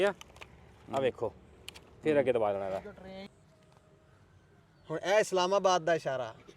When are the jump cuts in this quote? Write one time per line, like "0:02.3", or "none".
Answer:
0:03.3